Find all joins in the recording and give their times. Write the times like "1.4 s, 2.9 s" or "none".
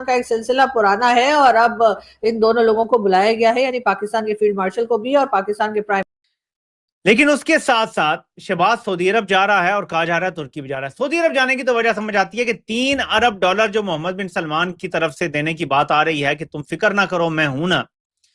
6.1 s

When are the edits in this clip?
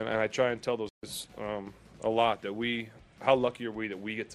1.0 s

